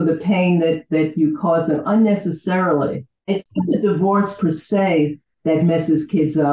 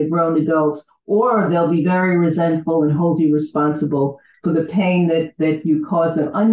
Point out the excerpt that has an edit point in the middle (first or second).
first